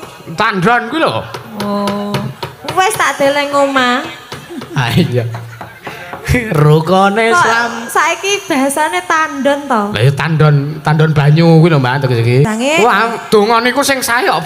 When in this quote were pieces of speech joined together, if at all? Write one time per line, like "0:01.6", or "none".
0:12.5